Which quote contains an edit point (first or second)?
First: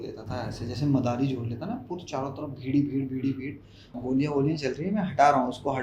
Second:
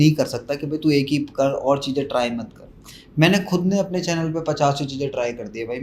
first